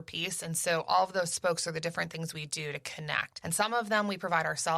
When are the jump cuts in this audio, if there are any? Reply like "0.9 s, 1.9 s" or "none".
3.3 s